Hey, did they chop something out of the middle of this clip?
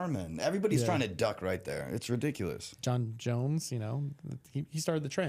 no; 0 cuts

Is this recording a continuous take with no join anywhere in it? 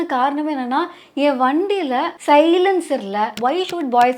no; 2 cuts; at 2.1 s, 3.3 s

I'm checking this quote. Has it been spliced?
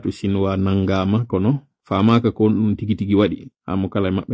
no; 0 cuts

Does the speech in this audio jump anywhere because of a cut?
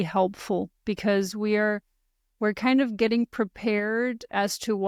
no; 0 cuts

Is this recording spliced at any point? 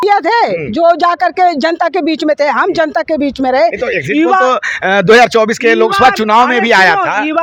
no; 0 cuts

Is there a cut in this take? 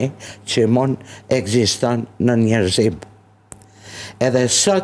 no; 0 cuts

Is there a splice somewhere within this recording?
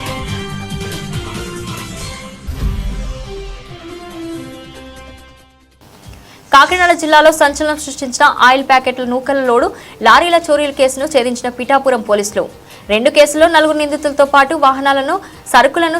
no; 0 cuts

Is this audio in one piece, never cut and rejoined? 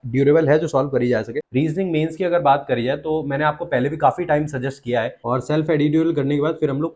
no; 2 cuts; at 1.4 s, 5.2 s

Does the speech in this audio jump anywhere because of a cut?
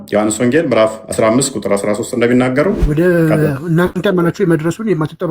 yes; 2 cuts; at 2.8 s, 4.0 s

